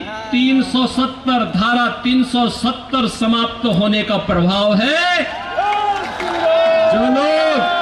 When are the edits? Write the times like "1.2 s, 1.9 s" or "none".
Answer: none